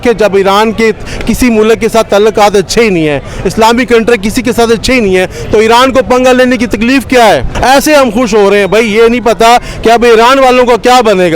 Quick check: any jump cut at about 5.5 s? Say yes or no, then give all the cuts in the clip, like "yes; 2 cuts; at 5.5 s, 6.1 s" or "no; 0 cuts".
no; 1 cut; at 7.5 s